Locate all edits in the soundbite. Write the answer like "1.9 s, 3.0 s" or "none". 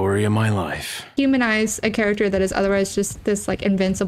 1.1 s